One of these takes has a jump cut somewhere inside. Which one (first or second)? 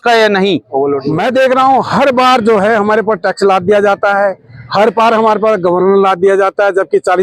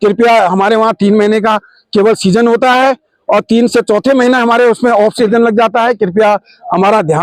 first